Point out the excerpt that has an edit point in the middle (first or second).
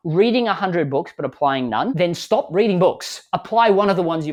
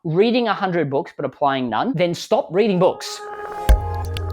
second